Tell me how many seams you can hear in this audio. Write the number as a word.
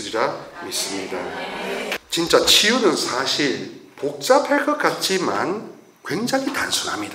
one